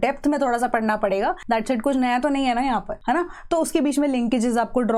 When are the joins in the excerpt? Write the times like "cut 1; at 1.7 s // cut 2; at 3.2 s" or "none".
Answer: cut 1; at 1.4 s // cut 2; at 2.9 s